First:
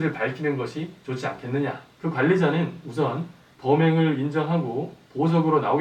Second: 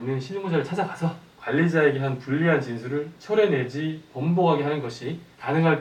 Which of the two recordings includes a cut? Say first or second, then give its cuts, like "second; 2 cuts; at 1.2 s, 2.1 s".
first; 1 cut; at 1.9 s